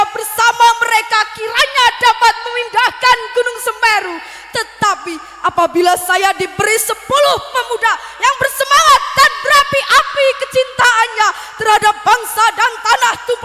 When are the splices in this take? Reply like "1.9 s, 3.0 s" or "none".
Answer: none